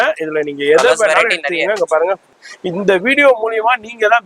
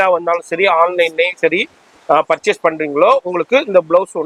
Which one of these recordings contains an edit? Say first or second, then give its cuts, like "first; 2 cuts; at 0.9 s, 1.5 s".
first; 1 cut; at 2.3 s